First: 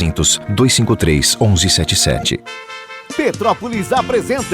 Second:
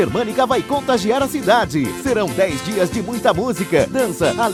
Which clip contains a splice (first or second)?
first